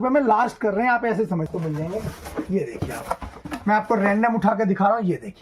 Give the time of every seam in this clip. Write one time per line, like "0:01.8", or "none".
0:01.5